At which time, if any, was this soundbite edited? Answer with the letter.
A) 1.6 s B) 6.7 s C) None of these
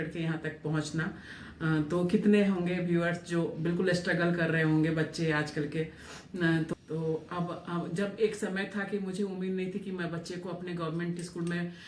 B